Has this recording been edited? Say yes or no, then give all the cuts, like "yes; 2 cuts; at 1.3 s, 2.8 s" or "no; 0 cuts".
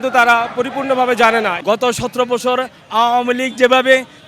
yes; 1 cut; at 1.6 s